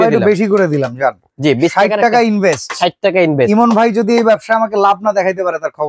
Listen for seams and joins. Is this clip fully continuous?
yes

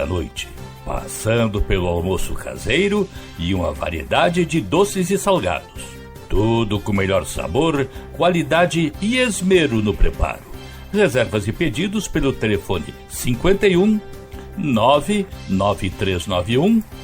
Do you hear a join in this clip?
no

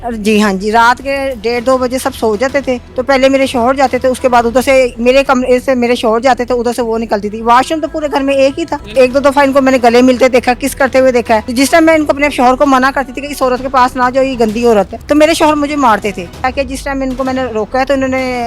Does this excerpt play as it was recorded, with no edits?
no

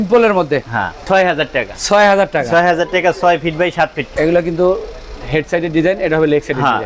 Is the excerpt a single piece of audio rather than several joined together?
no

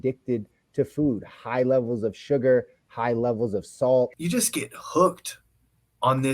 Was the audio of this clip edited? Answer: yes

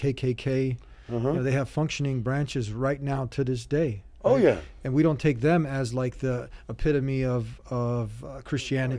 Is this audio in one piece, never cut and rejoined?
yes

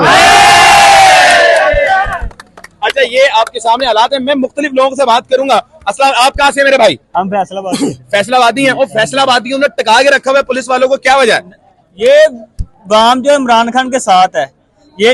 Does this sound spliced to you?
no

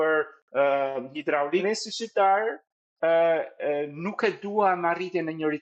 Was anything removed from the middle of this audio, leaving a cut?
yes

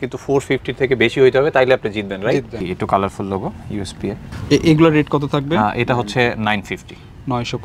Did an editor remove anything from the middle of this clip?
yes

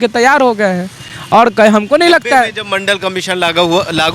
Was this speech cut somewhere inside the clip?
no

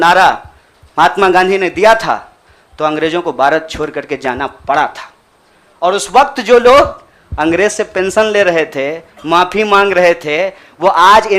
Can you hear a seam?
no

